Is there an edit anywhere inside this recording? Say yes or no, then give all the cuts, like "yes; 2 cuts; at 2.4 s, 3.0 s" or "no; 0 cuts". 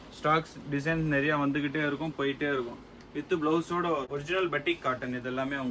yes; 1 cut; at 4.1 s